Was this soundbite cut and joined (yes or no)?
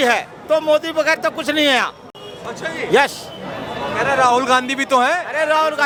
no